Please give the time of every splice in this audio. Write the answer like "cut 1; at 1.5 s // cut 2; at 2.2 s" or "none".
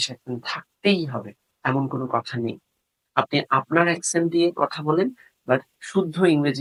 none